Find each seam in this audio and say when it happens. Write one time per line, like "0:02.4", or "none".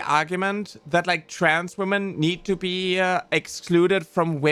none